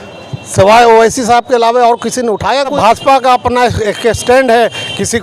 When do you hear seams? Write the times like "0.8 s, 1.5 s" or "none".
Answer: 2.8 s